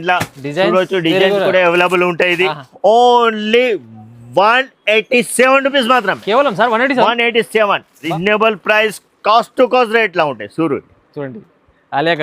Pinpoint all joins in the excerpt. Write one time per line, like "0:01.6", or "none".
0:08.0

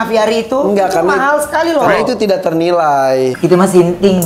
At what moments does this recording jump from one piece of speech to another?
0:03.4

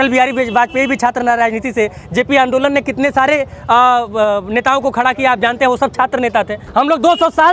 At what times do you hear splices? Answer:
0:06.6

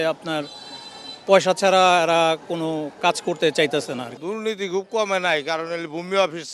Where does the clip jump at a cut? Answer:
0:04.1

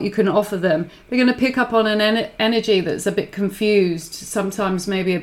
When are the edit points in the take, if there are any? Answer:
none

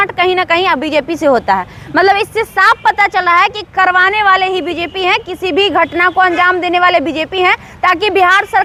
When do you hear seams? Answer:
none

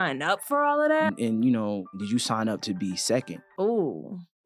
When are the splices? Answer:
0:01.1
0:02.0
0:03.4

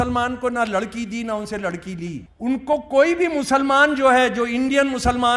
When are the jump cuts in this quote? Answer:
0:02.3

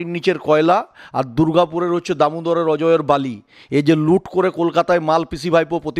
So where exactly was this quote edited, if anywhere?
none

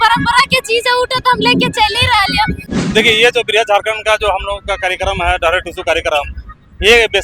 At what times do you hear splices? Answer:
0:02.6

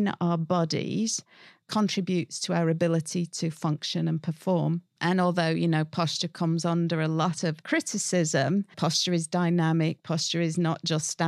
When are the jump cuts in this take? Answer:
0:04.9
0:07.6
0:08.7

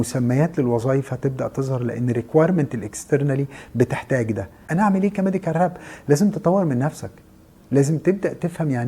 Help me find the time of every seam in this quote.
0:04.6

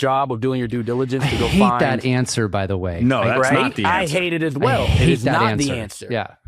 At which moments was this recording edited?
none

